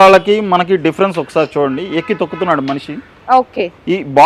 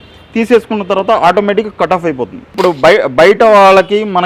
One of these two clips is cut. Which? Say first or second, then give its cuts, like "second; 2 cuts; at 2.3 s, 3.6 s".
second; 1 cut; at 2.5 s